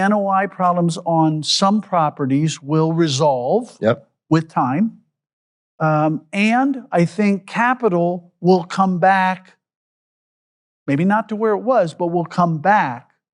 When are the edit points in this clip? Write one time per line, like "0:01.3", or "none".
none